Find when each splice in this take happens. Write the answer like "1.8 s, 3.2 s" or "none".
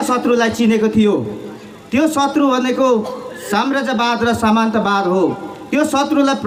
none